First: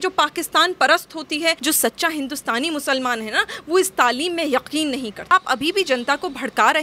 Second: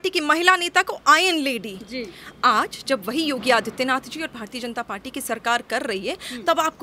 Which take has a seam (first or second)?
first